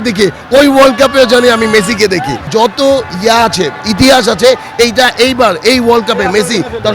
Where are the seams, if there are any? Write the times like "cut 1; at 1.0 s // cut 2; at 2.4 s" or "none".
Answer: cut 1; at 2.4 s